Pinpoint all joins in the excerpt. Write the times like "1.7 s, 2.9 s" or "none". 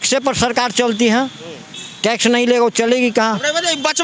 none